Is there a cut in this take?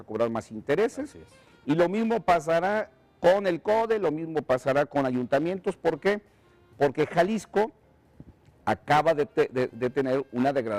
no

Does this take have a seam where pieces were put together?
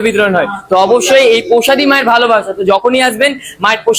no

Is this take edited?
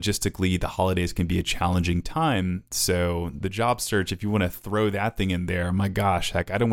no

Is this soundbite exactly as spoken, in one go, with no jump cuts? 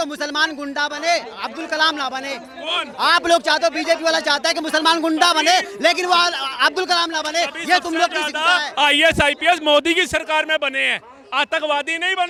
yes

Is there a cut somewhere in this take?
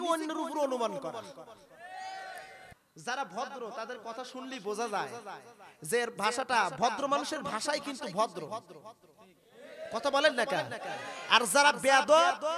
yes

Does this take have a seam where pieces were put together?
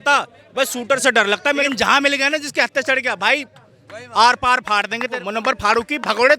yes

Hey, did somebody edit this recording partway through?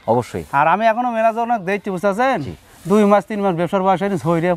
no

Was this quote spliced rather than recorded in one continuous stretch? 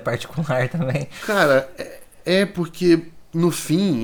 no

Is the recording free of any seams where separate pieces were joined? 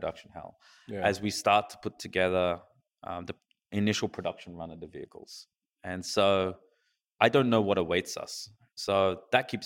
no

